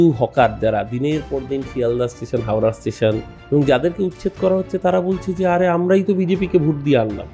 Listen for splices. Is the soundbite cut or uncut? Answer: cut